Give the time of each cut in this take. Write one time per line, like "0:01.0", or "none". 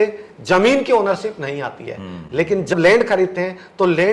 0:02.7